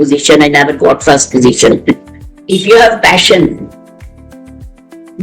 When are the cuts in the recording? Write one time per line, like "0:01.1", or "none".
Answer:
0:02.4

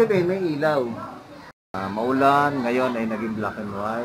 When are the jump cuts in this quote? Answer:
0:01.7

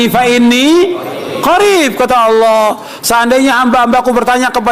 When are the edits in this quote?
none

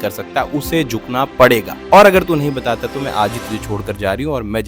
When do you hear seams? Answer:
0:01.8

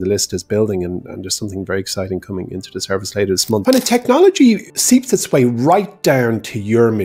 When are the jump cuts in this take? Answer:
0:03.6
0:04.7

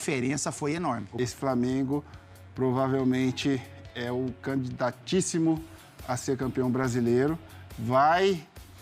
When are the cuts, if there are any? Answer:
0:01.1

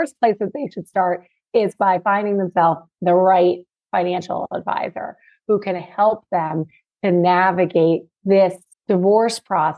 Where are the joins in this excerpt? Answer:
0:02.9
0:08.3

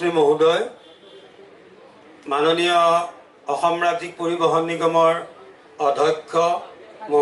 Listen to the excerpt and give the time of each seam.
none

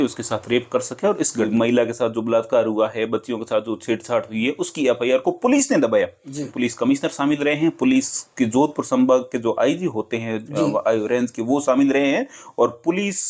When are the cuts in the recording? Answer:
0:01.5
0:06.4

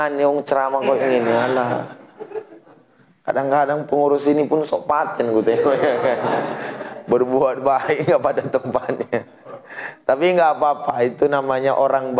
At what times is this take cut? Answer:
none

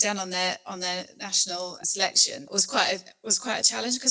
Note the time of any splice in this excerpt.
0:02.4

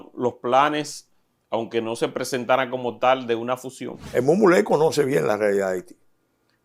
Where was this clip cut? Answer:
0:04.1

